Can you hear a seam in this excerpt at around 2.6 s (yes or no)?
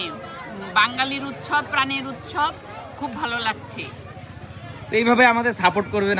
no